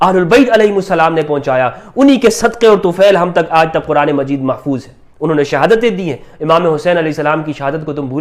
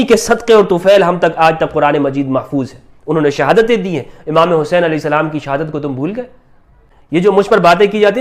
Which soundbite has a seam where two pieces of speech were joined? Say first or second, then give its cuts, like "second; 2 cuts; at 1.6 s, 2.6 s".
second; 1 cut; at 7.1 s